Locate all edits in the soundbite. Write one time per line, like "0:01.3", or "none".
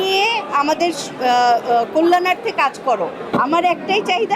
0:03.3